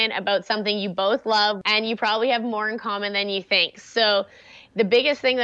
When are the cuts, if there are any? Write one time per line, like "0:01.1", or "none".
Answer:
0:01.6